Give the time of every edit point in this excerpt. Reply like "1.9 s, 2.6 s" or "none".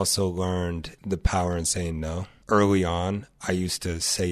0.9 s, 2.3 s